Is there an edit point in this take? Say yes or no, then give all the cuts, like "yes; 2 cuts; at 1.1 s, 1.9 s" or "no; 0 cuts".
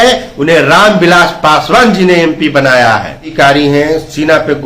yes; 1 cut; at 3.3 s